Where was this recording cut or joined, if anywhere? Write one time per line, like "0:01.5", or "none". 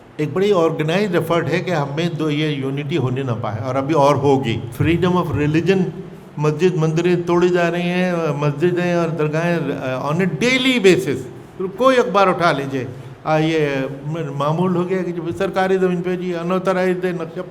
0:04.7